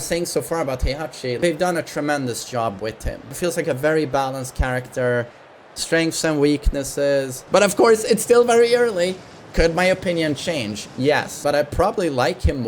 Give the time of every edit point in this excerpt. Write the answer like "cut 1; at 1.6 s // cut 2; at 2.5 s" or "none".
cut 1; at 1.4 s // cut 2; at 3.3 s // cut 3; at 7.4 s // cut 4; at 11.4 s